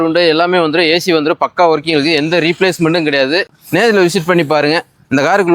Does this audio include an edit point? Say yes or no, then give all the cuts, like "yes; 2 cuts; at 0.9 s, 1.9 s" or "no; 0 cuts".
yes; 1 cut; at 3.6 s